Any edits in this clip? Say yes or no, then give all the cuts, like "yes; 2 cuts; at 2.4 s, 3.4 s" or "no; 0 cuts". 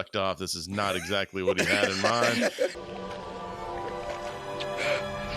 yes; 1 cut; at 2.8 s